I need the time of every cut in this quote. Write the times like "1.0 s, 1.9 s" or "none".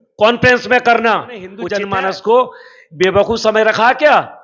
1.6 s

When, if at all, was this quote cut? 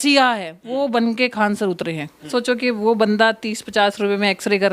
2.3 s

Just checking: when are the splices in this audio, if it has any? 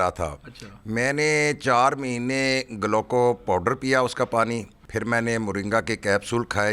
4.8 s

